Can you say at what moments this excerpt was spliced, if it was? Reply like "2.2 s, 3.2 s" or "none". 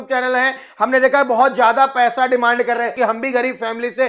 2.9 s